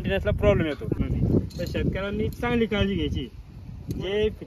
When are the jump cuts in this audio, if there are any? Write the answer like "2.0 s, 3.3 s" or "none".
1.0 s